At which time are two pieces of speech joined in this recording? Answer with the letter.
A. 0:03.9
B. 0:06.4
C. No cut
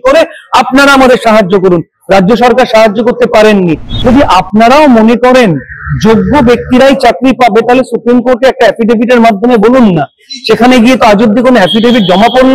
A